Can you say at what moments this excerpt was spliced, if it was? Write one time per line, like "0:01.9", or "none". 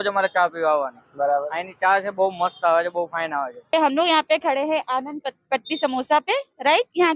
0:03.7